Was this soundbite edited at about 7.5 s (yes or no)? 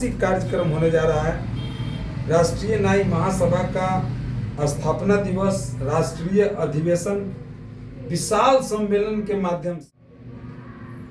no